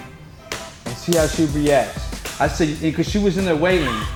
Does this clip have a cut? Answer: no; 0 cuts

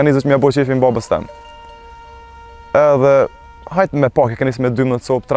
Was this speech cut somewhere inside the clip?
no; 0 cuts

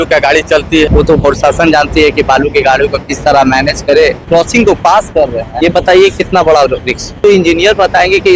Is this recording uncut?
no; 4 cuts; at 0.9 s, 4.2 s, 5.4 s, 7.2 s

